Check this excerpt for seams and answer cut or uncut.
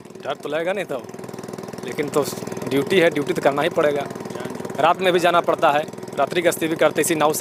uncut